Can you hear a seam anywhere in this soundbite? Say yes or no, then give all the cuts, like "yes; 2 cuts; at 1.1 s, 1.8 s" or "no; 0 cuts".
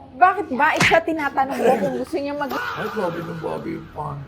yes; 1 cut; at 2.5 s